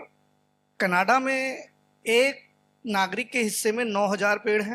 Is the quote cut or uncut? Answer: uncut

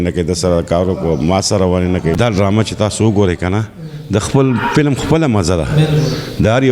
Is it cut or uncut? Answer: cut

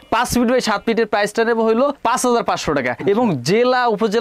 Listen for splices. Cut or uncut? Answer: uncut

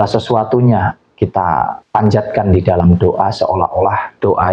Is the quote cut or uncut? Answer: cut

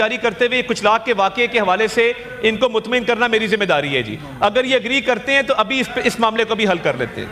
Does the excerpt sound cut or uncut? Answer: uncut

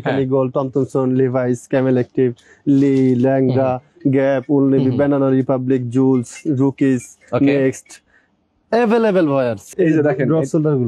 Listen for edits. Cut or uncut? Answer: cut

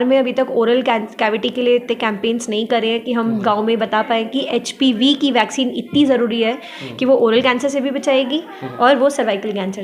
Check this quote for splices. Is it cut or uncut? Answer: uncut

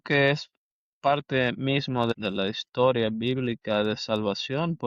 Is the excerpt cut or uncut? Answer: cut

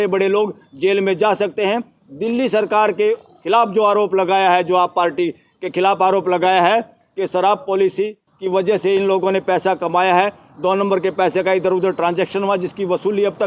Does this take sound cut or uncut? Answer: uncut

